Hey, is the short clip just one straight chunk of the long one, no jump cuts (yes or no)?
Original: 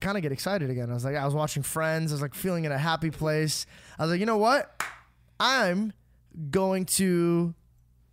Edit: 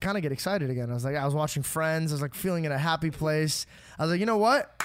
yes